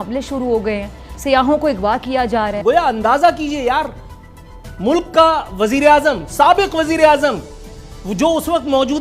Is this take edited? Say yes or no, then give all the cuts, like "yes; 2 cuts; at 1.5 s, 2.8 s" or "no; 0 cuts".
yes; 1 cut; at 2.6 s